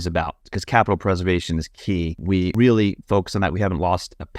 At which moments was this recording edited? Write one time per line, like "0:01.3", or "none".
0:02.4